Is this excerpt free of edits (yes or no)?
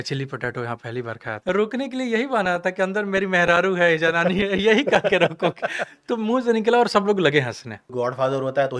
no